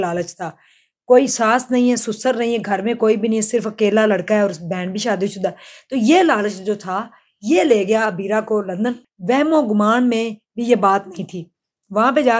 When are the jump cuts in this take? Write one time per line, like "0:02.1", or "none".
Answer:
0:09.1